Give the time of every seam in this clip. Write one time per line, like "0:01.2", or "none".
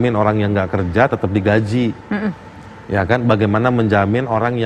none